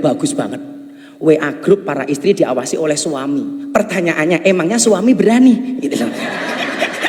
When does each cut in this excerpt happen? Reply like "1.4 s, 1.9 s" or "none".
none